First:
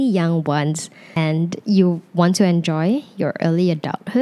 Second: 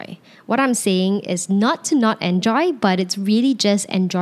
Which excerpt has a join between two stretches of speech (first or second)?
first